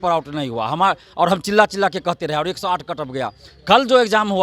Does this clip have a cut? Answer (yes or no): no